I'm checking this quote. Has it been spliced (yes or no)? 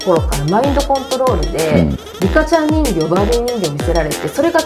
yes